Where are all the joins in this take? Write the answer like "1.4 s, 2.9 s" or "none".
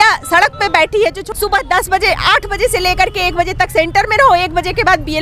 1.3 s